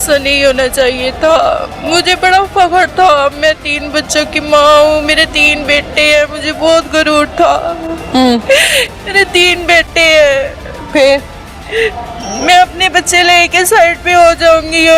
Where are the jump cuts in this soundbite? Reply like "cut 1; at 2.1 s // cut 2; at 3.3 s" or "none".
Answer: none